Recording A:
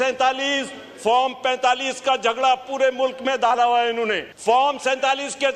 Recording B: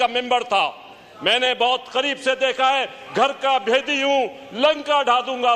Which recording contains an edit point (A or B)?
A